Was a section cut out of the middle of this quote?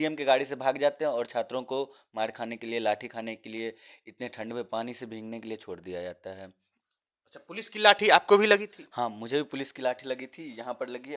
no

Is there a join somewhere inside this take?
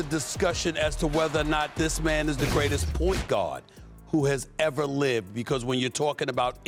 no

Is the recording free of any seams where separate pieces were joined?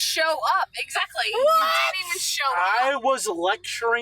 no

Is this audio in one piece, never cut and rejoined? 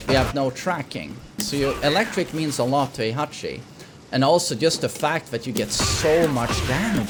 yes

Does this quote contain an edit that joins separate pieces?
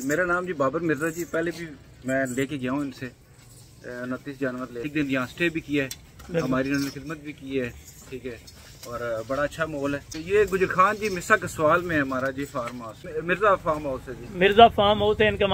yes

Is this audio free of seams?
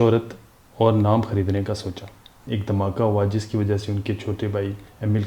no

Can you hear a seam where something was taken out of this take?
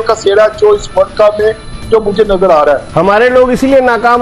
yes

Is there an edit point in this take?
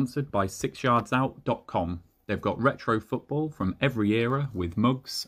no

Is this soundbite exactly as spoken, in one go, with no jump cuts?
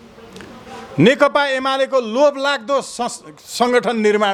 yes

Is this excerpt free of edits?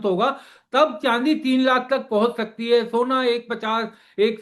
yes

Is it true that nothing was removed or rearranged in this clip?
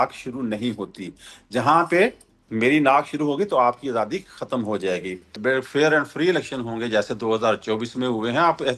no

